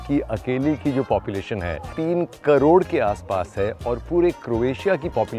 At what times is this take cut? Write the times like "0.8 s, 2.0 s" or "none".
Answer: 1.9 s